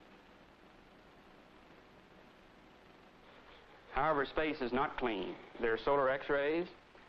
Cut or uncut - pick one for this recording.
cut